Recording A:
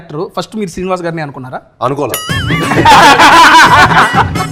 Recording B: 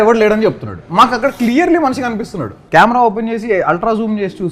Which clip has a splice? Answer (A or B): B